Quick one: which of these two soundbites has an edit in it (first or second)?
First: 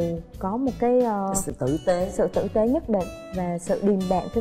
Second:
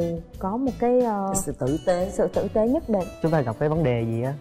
second